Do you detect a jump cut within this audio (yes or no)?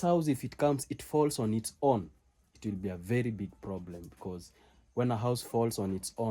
no